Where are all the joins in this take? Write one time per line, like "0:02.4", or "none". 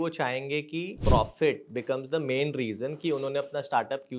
0:00.9